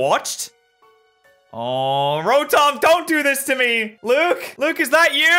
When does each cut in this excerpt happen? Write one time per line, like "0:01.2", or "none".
0:03.9
0:04.5